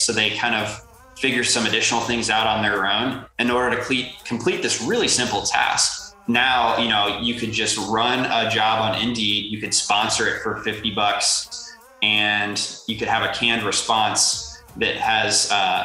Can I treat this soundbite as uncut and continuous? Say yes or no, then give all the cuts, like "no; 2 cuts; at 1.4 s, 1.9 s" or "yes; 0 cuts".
no; 1 cut; at 6.1 s